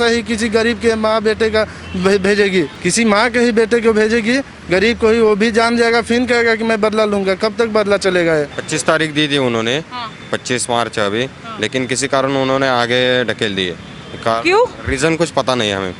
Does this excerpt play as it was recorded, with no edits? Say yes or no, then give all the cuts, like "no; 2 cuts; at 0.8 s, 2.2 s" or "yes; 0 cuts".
no; 2 cuts; at 2.7 s, 8.6 s